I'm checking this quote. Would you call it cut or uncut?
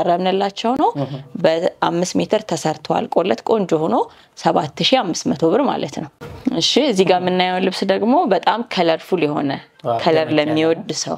uncut